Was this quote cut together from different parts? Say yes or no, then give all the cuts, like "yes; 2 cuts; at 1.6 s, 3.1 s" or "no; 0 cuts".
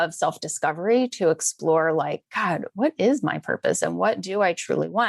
no; 0 cuts